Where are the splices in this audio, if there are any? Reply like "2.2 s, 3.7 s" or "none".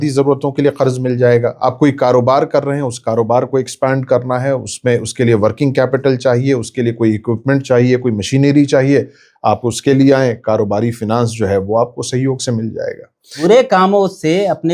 13.4 s

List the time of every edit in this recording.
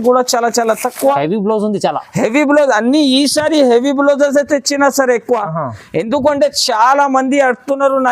1.2 s

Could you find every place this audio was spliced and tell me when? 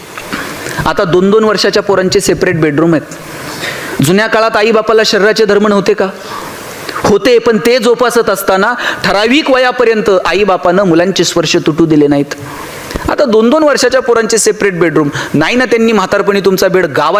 none

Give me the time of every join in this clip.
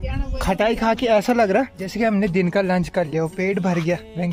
1.8 s

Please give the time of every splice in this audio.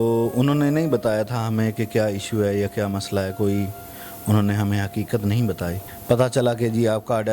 5.9 s

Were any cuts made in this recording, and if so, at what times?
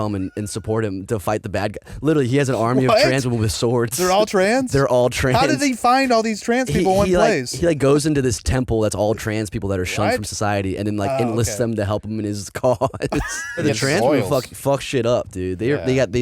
7.5 s, 13.6 s

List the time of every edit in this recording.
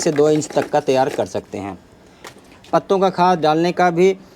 2.3 s

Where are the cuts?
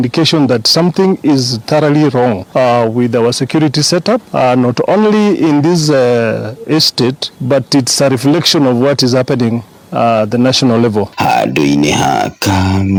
none

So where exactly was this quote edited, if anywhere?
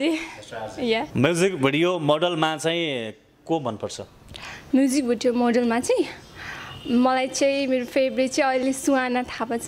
1.1 s

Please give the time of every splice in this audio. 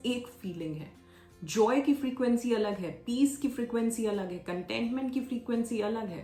none

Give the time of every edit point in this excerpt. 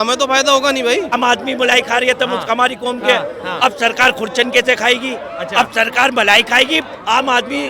1.1 s

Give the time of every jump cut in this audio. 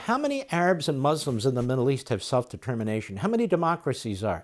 none

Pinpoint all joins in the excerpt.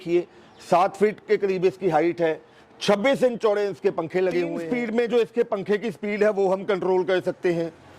4.7 s

